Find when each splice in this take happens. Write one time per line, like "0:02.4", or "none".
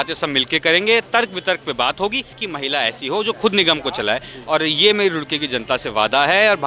0:02.5